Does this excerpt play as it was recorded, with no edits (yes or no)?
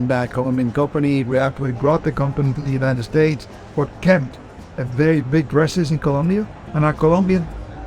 no